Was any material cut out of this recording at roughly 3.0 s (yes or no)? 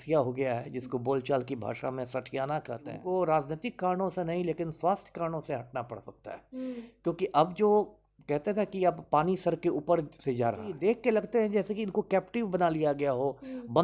yes